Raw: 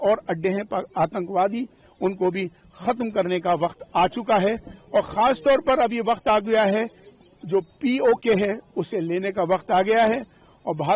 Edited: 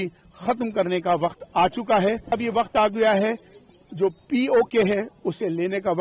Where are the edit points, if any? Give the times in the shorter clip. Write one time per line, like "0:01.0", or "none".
0:02.4